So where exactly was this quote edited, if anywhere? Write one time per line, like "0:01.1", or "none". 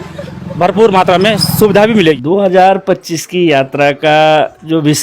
0:02.1